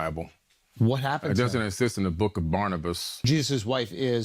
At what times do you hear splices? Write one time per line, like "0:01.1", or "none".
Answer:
0:03.1